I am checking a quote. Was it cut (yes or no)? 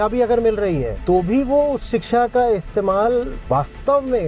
yes